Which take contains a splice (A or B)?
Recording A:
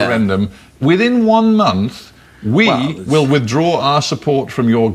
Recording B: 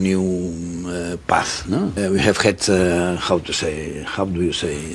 B